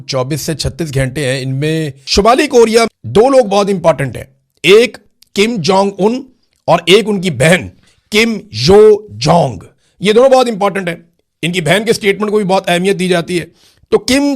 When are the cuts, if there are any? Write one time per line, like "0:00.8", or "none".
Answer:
0:02.0
0:02.9